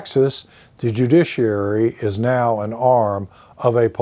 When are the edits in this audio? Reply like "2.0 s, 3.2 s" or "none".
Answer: none